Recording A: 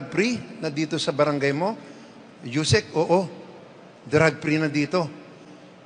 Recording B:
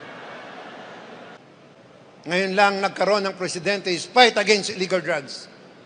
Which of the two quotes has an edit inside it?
B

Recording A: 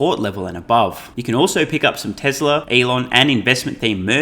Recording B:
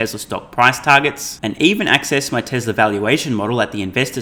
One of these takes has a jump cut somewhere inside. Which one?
A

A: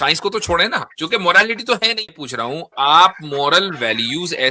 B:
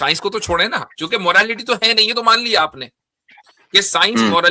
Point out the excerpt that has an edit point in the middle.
A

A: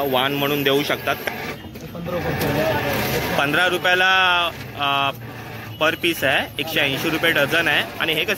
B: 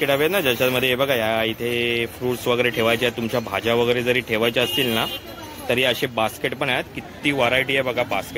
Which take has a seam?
A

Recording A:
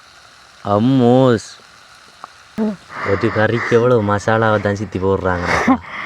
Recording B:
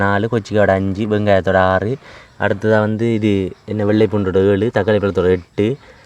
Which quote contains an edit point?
A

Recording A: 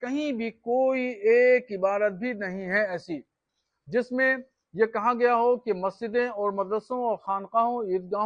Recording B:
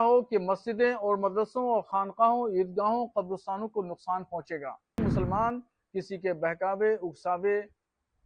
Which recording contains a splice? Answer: B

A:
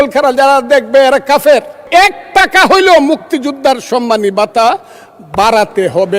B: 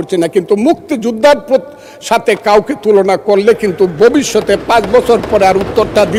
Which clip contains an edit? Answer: A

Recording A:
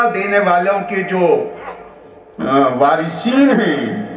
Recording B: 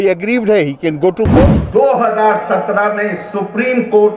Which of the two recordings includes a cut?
B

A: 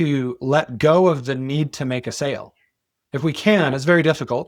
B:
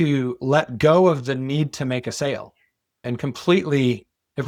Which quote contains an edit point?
A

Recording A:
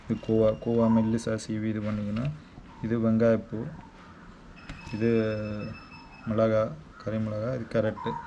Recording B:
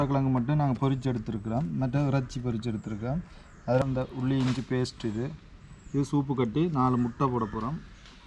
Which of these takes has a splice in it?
B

